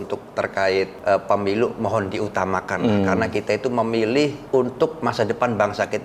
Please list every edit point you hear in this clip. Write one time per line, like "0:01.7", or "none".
0:00.9
0:04.4